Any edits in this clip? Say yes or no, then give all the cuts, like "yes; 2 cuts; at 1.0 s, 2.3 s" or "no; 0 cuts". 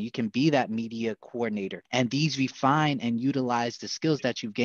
yes; 1 cut; at 1.8 s